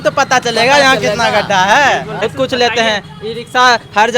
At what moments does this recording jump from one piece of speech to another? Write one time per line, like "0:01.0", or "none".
0:02.2